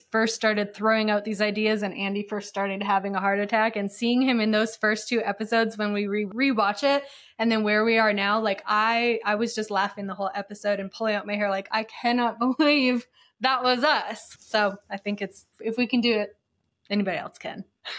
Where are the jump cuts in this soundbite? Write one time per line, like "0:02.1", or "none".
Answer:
none